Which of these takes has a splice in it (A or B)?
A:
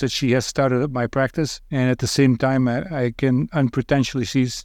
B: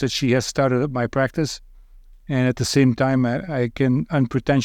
A